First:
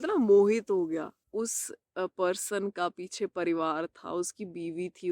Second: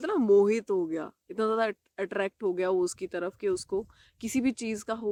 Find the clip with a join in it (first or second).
first